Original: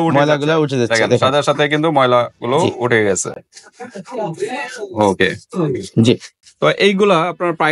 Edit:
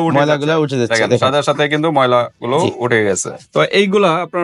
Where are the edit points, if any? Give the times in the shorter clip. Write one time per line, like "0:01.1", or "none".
0:03.3